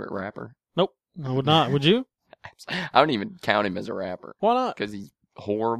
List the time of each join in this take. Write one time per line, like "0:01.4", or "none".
0:04.3